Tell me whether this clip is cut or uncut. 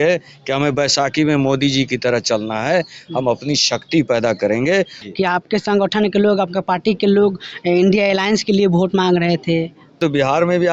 cut